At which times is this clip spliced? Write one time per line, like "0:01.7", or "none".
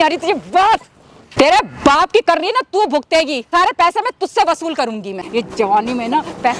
0:01.3
0:03.5
0:05.2